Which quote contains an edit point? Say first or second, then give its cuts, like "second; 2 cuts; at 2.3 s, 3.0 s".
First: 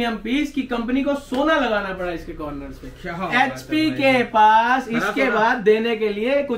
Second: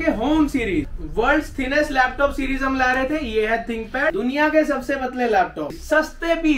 second; 3 cuts; at 1.0 s, 4.1 s, 5.8 s